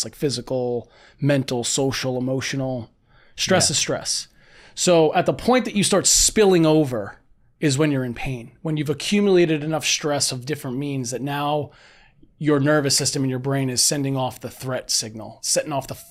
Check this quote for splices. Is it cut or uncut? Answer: uncut